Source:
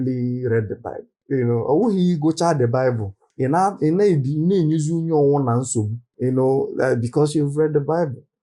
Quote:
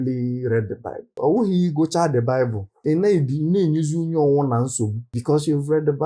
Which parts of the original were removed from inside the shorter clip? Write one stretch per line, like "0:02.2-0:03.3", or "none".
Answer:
0:01.2-0:01.6
0:03.3-0:03.8
0:06.1-0:07.0